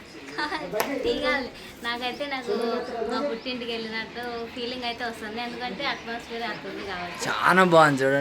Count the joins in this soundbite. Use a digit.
0